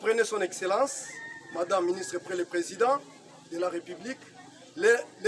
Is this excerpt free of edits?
yes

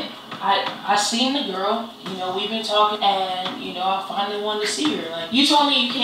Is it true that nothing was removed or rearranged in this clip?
no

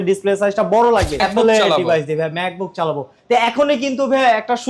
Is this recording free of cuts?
no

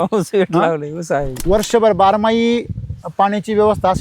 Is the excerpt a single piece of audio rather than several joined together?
no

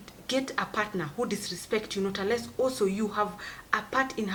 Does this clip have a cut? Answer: no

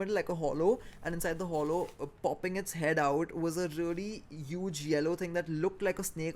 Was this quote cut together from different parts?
no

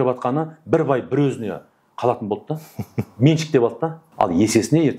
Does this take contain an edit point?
yes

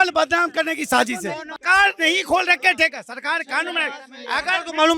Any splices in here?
yes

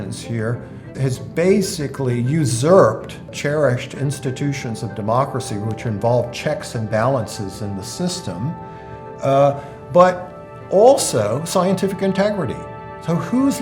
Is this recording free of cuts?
no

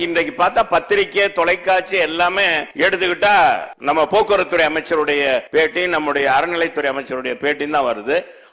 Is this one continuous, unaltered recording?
no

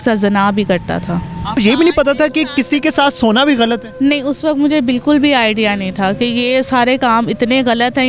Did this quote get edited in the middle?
yes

